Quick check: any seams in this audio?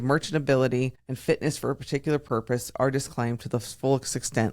yes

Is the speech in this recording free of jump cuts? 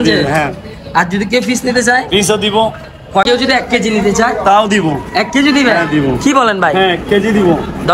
no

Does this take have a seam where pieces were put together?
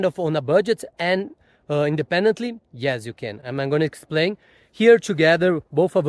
no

